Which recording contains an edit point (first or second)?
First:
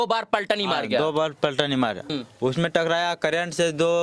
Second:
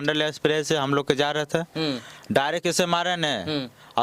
first